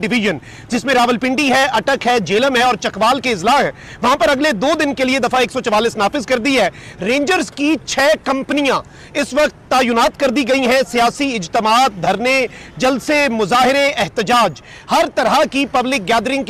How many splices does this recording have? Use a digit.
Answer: 0